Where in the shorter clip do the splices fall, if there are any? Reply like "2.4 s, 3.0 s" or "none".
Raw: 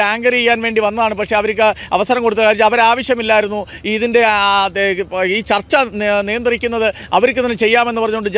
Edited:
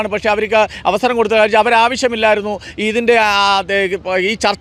none